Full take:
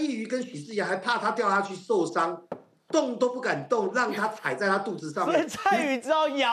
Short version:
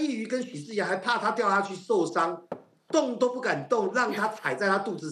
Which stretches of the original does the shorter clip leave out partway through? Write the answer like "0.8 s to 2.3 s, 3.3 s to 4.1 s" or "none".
none